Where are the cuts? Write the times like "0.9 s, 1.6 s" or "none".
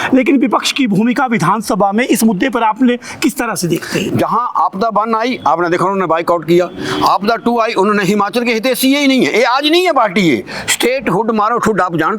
none